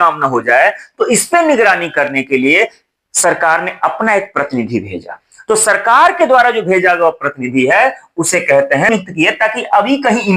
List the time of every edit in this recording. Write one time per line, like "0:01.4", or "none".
0:08.9